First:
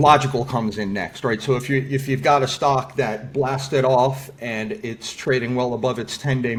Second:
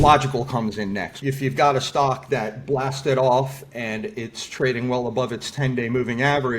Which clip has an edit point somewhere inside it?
second; 1 cut; at 1.2 s

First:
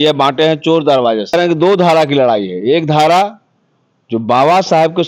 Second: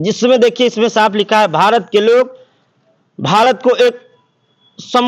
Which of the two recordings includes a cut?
first; 1 cut; at 1.3 s

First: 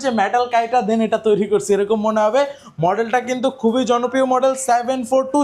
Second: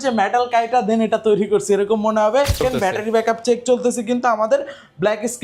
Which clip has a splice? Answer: second; 1 cut; at 2.6 s

